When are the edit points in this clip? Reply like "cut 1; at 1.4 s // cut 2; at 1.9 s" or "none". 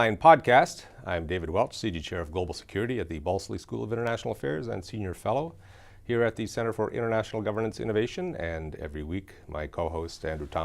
cut 1; at 9.7 s